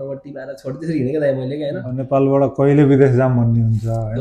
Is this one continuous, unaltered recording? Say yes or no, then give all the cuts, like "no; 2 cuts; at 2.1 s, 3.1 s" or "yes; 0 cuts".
no; 1 cut; at 1.9 s